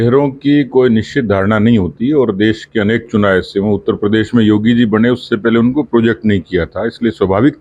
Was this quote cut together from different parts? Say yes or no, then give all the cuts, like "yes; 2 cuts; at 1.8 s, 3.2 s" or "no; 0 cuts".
no; 0 cuts